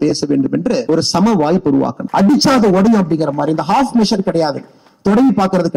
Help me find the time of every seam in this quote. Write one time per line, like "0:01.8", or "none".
0:02.0